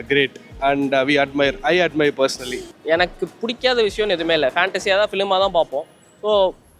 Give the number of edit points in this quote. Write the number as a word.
one